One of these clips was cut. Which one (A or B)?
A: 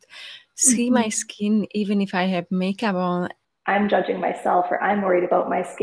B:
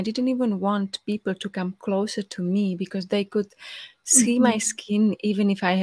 A